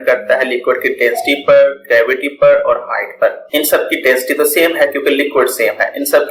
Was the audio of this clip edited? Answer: no; 0 cuts

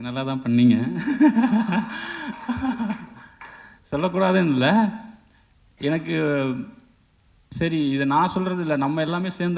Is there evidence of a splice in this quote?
no; 0 cuts

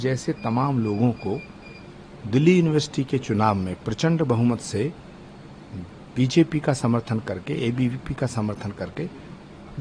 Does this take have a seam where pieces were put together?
no; 0 cuts

